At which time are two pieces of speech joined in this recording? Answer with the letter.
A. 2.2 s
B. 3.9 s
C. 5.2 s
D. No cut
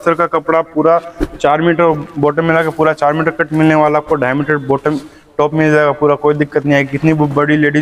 D